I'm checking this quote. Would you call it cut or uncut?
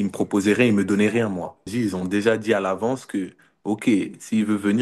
cut